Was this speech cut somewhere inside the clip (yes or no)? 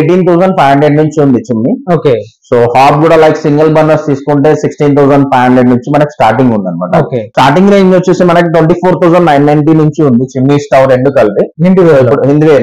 yes